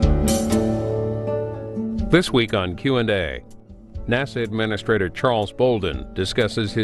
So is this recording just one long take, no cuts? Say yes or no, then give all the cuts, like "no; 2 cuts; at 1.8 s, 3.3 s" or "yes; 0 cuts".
yes; 0 cuts